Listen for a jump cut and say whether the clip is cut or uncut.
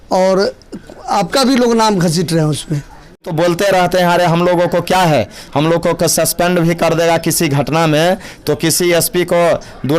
cut